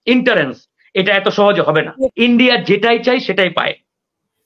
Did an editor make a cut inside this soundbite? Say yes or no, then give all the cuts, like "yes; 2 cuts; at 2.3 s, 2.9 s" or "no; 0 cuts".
yes; 1 cut; at 2.1 s